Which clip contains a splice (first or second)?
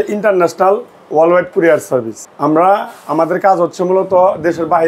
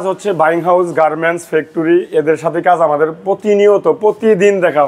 first